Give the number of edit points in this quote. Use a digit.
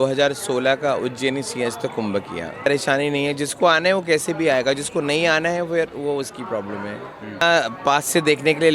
2